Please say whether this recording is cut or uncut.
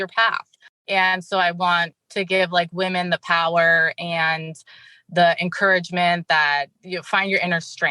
cut